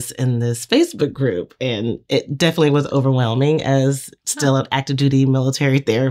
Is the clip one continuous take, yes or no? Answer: yes